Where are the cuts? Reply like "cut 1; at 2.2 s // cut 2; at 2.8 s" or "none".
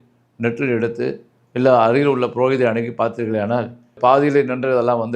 cut 1; at 4.0 s

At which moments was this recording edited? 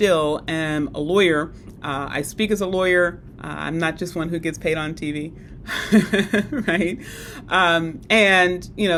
none

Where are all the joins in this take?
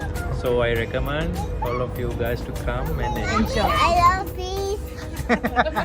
cut 1; at 3.8 s

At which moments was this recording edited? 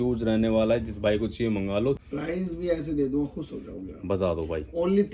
cut 1; at 2.0 s

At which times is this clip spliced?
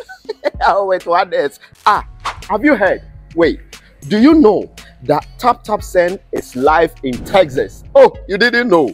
none

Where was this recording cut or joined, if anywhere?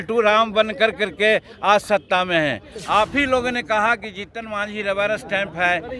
cut 1; at 2.7 s

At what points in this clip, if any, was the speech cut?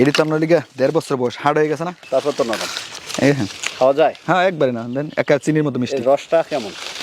none

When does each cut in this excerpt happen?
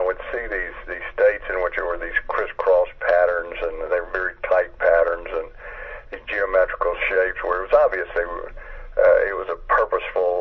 cut 1; at 8.0 s

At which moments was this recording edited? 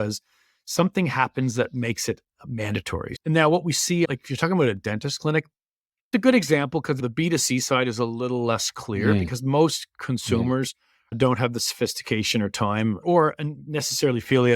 cut 1; at 3.2 s // cut 2; at 4.1 s // cut 3; at 6.1 s // cut 4; at 7.0 s // cut 5; at 13.0 s

